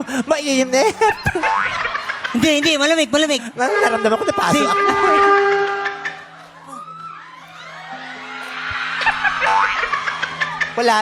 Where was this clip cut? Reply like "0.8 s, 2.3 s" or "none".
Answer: none